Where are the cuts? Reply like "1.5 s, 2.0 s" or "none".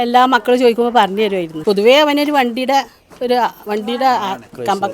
1.5 s